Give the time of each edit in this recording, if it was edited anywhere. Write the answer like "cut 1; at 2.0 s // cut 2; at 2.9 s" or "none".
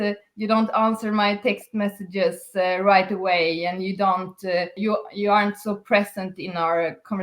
cut 1; at 4.8 s